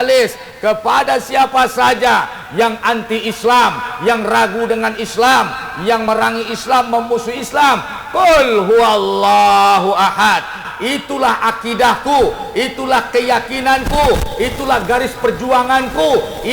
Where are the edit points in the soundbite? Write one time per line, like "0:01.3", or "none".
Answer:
0:06.0
0:10.6